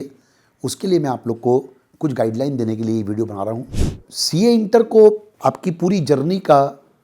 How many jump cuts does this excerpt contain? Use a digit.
1